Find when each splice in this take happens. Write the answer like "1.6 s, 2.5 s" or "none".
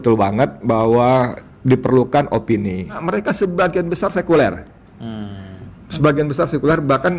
3.0 s